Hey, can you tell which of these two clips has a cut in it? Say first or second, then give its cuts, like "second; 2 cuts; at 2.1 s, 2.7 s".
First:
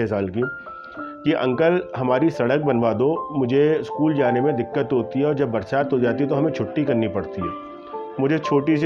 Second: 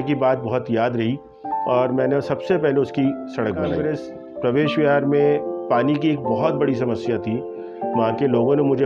second; 1 cut; at 3.8 s